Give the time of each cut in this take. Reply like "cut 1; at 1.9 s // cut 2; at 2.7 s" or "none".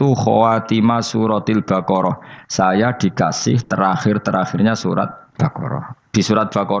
cut 1; at 5.2 s